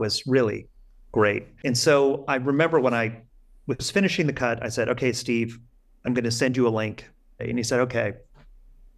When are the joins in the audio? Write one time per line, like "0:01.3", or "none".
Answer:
0:01.5
0:07.4